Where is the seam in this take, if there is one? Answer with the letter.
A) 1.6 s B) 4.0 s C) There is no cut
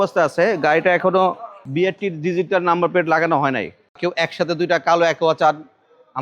B